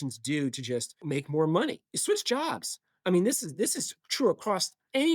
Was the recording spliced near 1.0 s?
yes; 2 cuts; at 1.0 s, 1.9 s

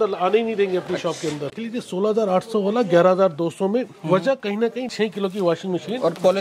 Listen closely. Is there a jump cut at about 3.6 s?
no; 2 cuts; at 1.5 s, 4.9 s

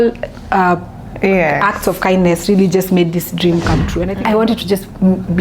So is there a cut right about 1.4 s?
no; 1 cut; at 4.0 s

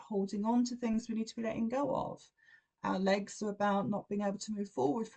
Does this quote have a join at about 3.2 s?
no; 0 cuts

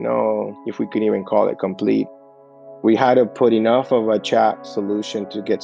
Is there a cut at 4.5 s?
no; 1 cut; at 2.2 s

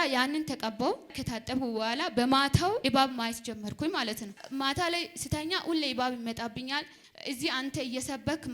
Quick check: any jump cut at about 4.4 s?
yes; 4 cuts; at 1.2 s, 2.8 s, 4.4 s, 7.0 s

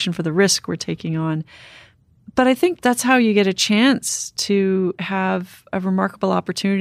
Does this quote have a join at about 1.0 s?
no; 2 cuts; at 2.8 s, 5.6 s

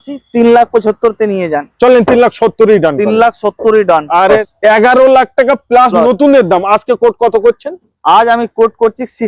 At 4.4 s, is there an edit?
yes; 1 cut; at 4.4 s

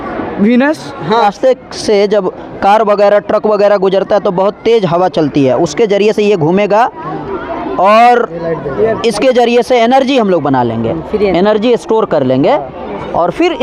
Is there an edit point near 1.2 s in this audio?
yes; 1 cut; at 1.2 s

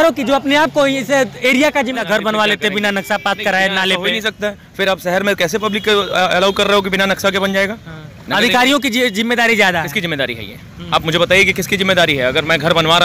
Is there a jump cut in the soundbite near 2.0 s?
yes; 1 cut; at 2.0 s

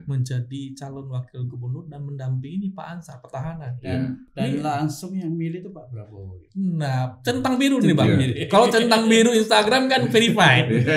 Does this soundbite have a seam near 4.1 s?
no; 0 cuts

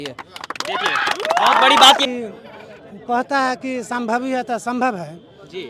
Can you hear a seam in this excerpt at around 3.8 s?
no; 1 cut; at 2.0 s

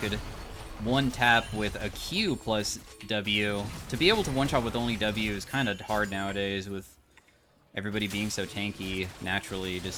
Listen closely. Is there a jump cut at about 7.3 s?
no; 0 cuts

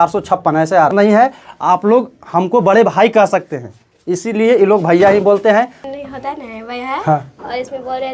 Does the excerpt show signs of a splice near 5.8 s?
yes; 2 cuts; at 0.9 s, 5.8 s

